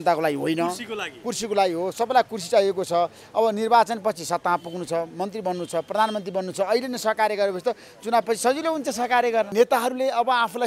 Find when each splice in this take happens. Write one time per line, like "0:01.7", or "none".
0:09.5